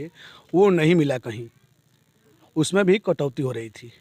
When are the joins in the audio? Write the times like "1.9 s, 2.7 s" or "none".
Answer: none